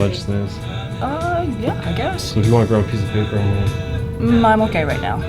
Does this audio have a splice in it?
no; 0 cuts

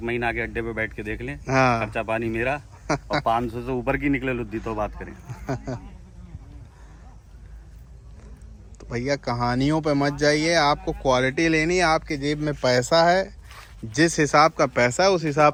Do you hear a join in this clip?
no; 0 cuts

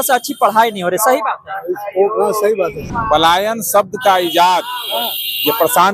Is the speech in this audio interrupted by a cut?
yes; 1 cut; at 2.9 s

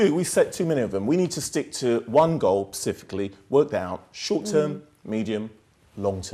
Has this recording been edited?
no; 0 cuts

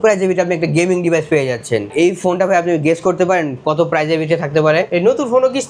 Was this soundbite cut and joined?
yes; 2 cuts; at 1.9 s, 4.9 s

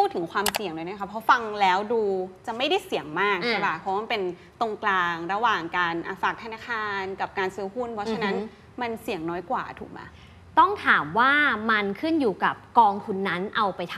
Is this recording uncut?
yes; 0 cuts

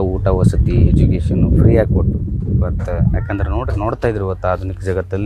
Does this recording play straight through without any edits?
yes; 0 cuts

